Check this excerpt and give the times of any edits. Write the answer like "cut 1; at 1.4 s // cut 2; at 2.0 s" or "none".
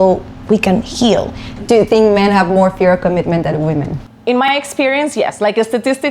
cut 1; at 1.4 s // cut 2; at 4.5 s